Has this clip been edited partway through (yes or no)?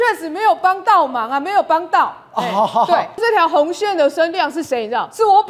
yes